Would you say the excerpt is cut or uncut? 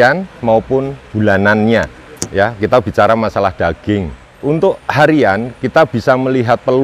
cut